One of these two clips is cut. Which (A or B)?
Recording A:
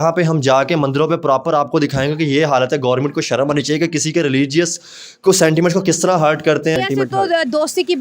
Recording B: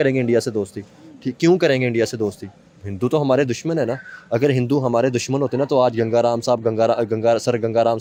A